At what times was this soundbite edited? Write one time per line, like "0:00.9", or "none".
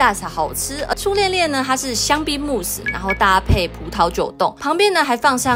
0:01.0
0:04.6